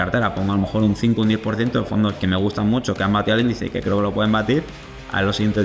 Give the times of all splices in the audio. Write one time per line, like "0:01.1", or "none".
none